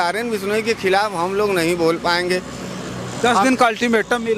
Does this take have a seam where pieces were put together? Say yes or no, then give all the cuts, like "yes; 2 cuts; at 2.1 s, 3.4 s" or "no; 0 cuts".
no; 0 cuts